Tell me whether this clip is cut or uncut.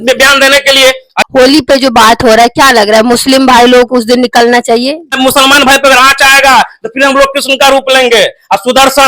cut